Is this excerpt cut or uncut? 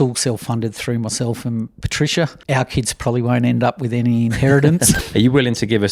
cut